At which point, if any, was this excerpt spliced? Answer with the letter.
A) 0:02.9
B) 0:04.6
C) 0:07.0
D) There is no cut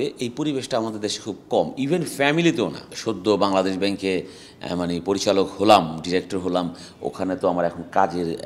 A